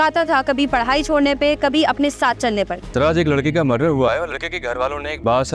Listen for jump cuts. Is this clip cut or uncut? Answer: cut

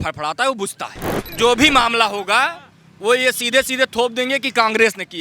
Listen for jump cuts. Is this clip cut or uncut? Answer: cut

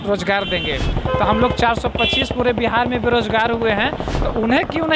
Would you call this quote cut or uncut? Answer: cut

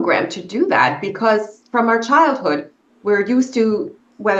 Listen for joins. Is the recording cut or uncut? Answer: uncut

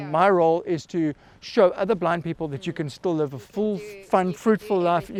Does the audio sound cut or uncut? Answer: uncut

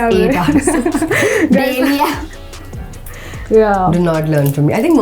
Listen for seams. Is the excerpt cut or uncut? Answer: uncut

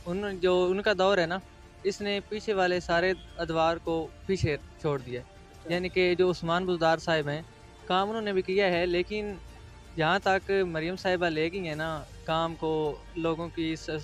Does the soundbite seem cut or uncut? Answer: uncut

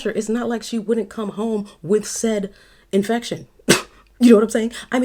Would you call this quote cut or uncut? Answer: uncut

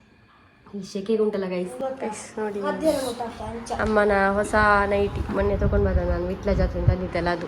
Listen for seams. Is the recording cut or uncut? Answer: cut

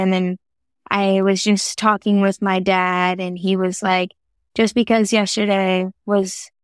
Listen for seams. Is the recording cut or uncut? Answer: uncut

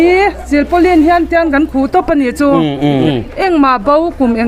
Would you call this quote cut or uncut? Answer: cut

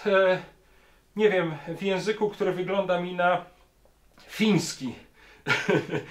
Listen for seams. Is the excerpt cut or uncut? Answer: uncut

